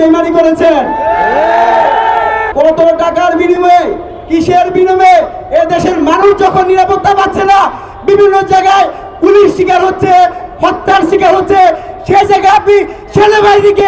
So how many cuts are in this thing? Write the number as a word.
one